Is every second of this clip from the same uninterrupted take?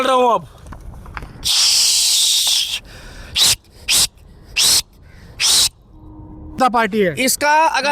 no; 1 cut; at 6.6 s

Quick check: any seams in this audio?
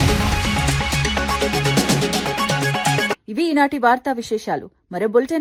no; 0 cuts

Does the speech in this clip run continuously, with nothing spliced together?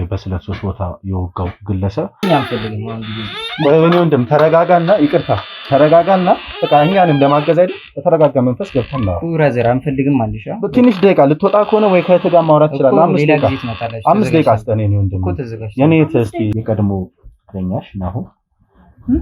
no; 2 cuts; at 2.2 s, 16.5 s

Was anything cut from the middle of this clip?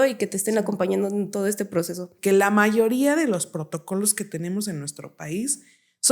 yes; 1 cut; at 2.1 s

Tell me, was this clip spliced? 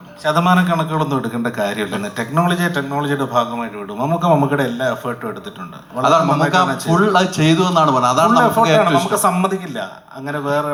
no; 0 cuts

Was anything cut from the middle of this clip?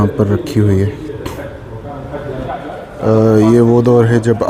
yes; 1 cut; at 2.4 s

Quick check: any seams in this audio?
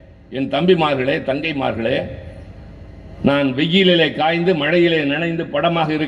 no; 0 cuts

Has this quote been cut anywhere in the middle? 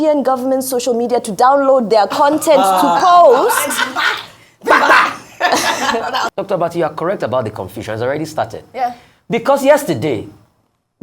yes; 1 cut; at 6.3 s

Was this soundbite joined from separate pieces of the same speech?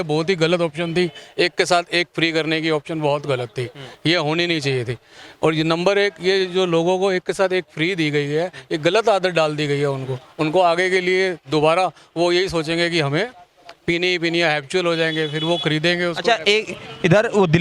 no; 0 cuts

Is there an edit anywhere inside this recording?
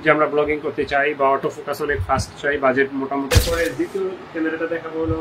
yes; 1 cut; at 3.3 s

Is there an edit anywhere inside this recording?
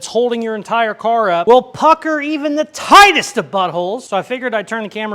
no; 0 cuts

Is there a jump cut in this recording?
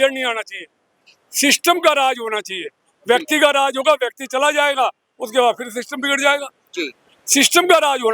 no; 0 cuts

